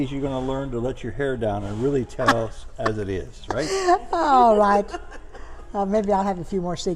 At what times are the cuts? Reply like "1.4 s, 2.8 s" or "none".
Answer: none